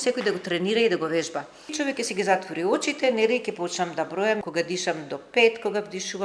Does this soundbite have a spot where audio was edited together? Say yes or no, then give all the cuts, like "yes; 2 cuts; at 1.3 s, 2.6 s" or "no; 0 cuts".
yes; 2 cuts; at 1.8 s, 4.4 s